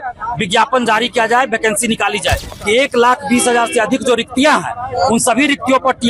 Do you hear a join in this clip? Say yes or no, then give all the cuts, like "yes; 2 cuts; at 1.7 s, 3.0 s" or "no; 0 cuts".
yes; 1 cut; at 2.5 s